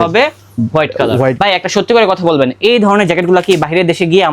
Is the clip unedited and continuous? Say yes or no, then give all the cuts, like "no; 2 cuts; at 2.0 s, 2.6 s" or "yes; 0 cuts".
no; 1 cut; at 1.4 s